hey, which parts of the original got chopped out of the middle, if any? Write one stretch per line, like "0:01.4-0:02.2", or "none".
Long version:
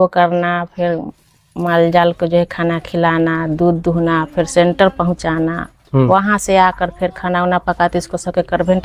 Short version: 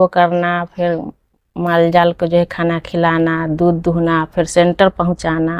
none